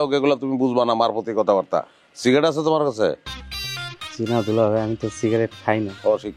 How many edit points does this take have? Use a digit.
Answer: 0